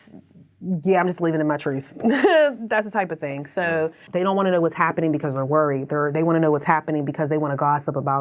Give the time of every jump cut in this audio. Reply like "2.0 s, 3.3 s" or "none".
4.0 s